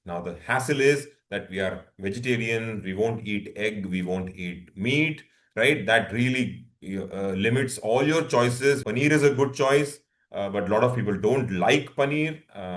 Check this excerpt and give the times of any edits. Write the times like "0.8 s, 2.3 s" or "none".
8.8 s